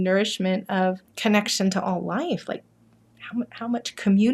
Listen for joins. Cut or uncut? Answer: cut